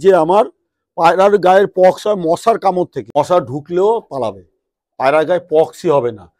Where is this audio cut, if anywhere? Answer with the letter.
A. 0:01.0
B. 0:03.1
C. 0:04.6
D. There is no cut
B